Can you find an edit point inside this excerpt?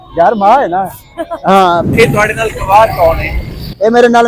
yes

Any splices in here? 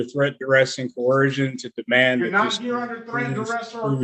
no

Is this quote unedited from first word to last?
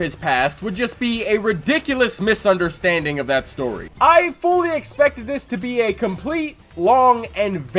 no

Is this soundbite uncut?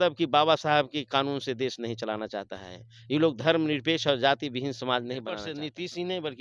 no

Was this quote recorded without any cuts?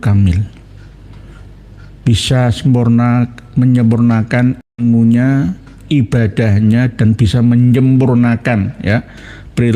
yes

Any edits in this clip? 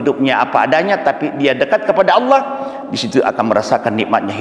no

